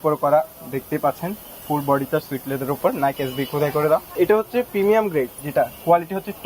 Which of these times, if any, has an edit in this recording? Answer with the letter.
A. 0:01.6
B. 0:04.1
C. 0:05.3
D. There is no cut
B